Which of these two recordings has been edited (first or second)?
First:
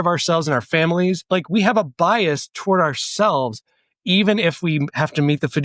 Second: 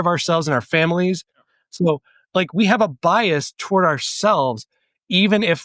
first